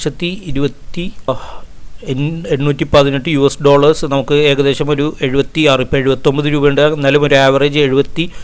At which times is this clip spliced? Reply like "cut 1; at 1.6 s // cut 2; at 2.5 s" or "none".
cut 1; at 1.3 s

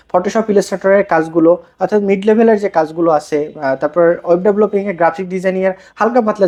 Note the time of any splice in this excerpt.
none

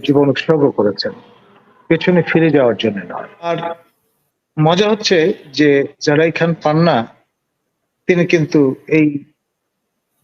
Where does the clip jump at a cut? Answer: cut 1; at 3.3 s

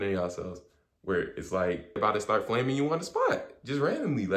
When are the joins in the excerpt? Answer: cut 1; at 2.0 s

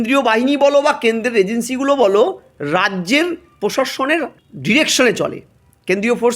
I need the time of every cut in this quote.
cut 1; at 4.5 s

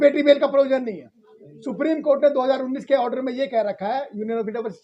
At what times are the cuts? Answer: none

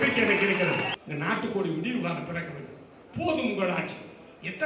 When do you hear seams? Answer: cut 1; at 1.0 s

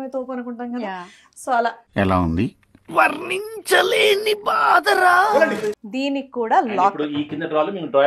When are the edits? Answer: cut 1; at 5.8 s

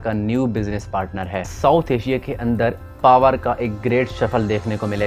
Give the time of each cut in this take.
cut 1; at 1.5 s

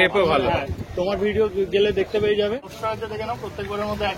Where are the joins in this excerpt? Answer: cut 1; at 2.7 s

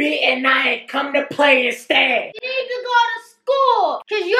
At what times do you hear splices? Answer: none

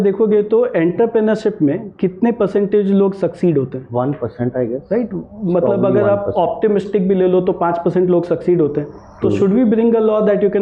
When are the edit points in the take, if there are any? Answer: none

